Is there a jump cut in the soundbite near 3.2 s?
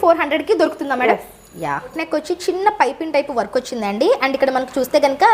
no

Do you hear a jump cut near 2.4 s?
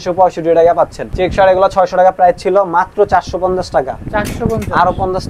no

